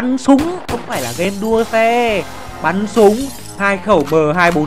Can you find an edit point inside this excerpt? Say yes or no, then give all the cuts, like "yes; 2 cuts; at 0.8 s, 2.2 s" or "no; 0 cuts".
no; 0 cuts